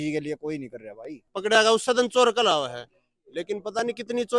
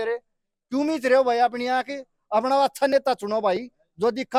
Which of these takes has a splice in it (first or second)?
first